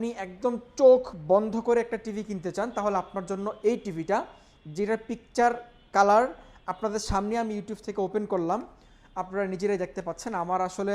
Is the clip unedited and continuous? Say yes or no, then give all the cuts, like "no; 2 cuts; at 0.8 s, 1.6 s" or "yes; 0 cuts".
yes; 0 cuts